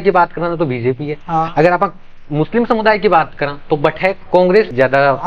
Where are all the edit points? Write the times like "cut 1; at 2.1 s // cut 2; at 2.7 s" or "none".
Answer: none

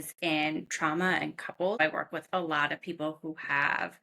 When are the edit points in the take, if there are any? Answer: cut 1; at 1.8 s

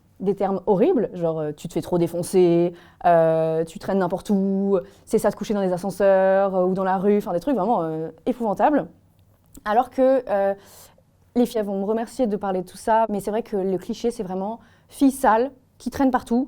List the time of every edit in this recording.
cut 1; at 11.6 s // cut 2; at 13.1 s

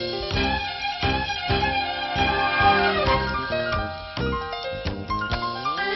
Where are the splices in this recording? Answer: none

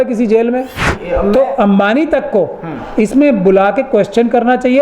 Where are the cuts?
cut 1; at 0.9 s

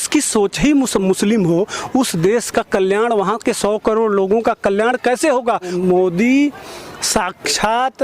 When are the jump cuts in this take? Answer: cut 1; at 5.7 s

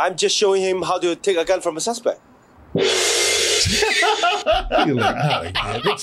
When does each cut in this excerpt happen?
cut 1; at 3.3 s

